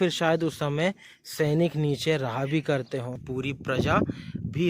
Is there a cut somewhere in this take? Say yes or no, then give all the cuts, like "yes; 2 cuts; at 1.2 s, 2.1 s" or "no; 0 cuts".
yes; 1 cut; at 3.2 s